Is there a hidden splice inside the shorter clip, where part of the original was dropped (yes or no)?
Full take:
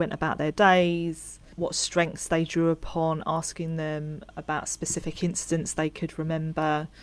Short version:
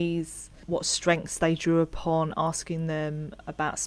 no